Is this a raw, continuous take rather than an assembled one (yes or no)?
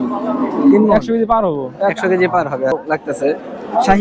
no